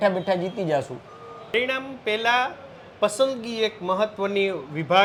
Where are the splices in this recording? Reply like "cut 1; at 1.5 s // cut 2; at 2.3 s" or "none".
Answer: none

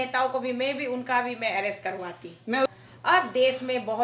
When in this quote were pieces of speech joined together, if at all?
cut 1; at 2.7 s

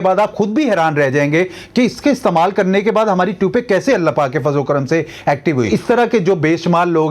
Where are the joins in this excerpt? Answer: cut 1; at 5.7 s

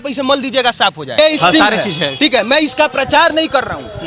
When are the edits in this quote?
cut 1; at 1.2 s

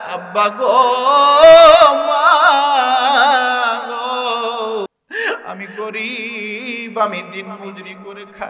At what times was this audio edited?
cut 1; at 4.9 s

